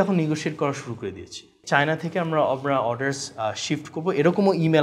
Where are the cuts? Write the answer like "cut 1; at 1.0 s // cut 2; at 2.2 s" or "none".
cut 1; at 1.5 s